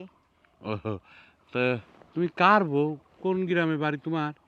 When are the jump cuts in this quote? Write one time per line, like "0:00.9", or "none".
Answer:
none